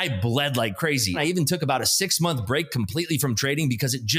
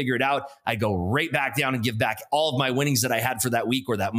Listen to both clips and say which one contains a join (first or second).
first